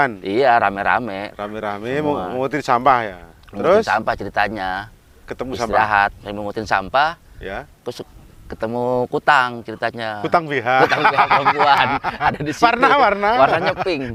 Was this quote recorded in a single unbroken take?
yes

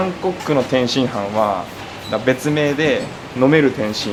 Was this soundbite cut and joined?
no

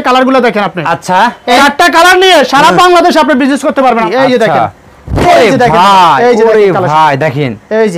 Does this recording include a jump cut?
yes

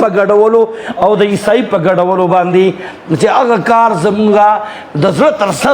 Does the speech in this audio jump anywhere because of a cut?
no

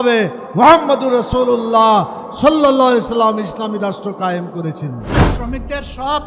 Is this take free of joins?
no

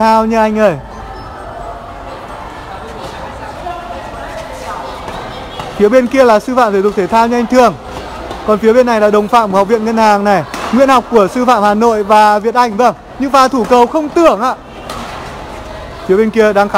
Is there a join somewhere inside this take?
no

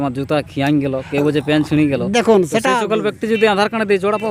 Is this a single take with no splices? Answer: yes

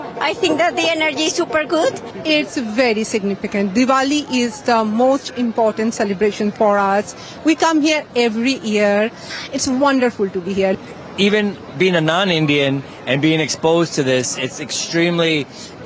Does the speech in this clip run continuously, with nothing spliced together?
yes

